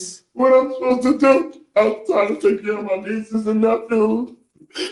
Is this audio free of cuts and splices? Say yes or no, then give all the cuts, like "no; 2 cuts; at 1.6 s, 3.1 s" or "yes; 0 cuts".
yes; 0 cuts